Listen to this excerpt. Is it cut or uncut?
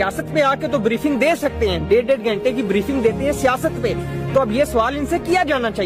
uncut